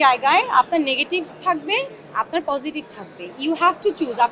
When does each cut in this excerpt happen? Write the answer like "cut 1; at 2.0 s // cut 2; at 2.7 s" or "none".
none

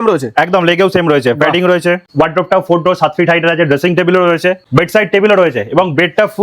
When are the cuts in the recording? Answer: cut 1; at 2.1 s

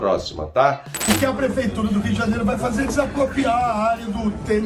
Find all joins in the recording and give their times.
cut 1; at 1.0 s

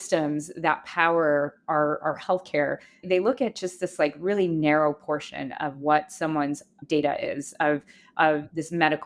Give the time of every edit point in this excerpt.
cut 1; at 3.0 s // cut 2; at 6.8 s

